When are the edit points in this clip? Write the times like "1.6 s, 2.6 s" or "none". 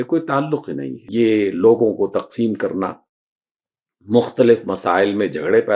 1.0 s